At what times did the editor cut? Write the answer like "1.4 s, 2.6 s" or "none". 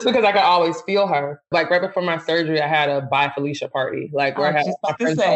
1.5 s